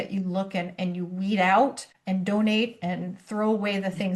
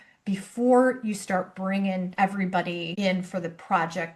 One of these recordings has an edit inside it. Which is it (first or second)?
second